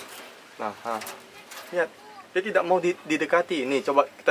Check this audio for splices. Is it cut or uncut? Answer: uncut